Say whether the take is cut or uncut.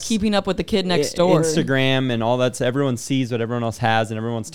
uncut